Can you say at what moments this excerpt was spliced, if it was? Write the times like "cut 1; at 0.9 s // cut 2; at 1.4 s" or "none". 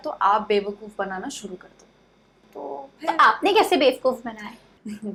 none